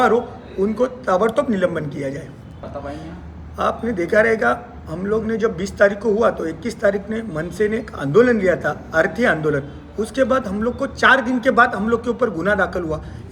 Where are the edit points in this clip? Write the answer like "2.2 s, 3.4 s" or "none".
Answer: none